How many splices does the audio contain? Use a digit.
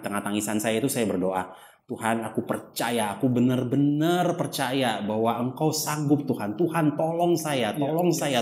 0